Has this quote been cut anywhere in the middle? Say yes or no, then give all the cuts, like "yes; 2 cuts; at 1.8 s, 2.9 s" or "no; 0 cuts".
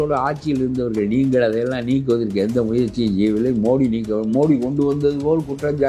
no; 0 cuts